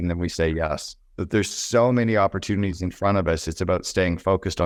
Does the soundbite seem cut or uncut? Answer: uncut